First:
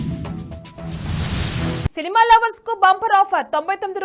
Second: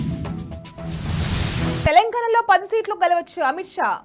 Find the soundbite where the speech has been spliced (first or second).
first